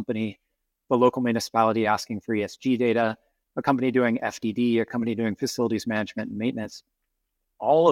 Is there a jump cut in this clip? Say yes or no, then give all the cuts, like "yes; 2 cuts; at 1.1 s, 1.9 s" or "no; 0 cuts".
no; 0 cuts